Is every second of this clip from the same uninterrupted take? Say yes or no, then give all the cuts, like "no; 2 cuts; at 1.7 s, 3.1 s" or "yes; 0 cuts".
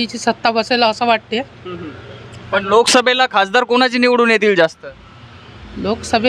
yes; 0 cuts